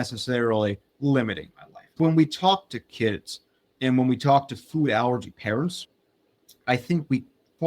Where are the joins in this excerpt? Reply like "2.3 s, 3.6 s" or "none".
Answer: 1.9 s